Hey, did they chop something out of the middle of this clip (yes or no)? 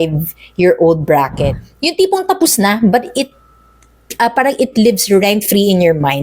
yes